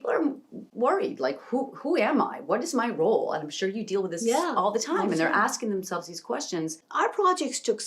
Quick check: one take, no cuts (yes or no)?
no